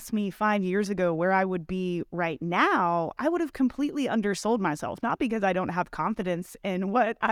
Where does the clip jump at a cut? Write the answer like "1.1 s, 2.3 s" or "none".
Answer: none

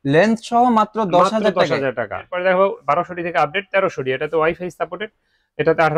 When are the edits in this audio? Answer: 2.3 s

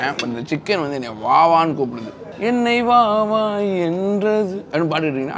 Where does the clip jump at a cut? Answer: none

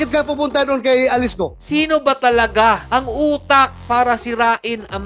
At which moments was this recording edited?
1.6 s

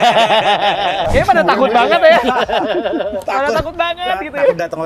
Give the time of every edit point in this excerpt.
1.1 s

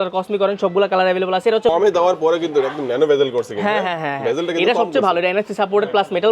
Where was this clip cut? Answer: 1.7 s

